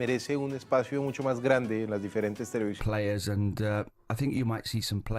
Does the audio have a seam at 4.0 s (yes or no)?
no